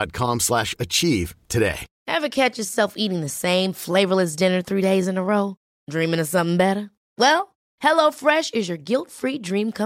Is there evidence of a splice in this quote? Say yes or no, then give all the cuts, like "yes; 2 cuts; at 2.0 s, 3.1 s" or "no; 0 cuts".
yes; 1 cut; at 1.9 s